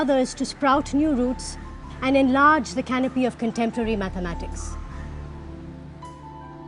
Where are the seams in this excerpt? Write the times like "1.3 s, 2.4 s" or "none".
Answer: 3.9 s